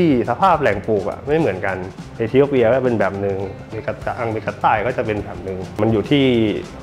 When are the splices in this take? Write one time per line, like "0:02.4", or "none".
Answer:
none